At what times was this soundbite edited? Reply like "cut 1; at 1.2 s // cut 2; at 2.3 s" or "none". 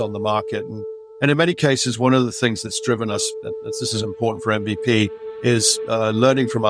none